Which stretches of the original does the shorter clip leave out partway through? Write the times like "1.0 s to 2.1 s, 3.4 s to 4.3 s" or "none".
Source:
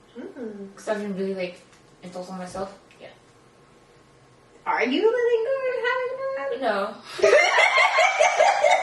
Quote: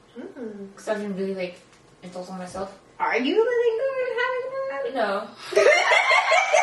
2.8 s to 4.5 s